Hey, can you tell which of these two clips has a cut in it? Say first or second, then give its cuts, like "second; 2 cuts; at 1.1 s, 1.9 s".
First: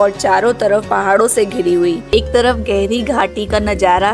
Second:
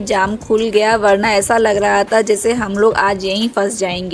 first; 1 cut; at 2.0 s